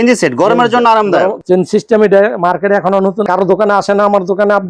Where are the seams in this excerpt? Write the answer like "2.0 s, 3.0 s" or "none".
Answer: 1.4 s